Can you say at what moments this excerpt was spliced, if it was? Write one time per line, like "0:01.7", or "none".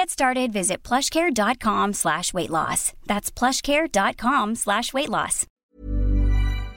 0:05.6